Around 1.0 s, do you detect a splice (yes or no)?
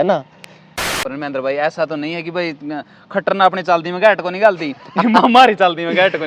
yes